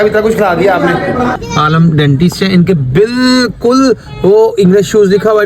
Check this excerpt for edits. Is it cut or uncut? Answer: cut